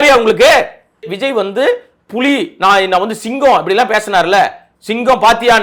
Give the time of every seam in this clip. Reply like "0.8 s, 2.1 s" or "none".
1.2 s